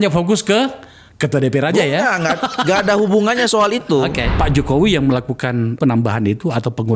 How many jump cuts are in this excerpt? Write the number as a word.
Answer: one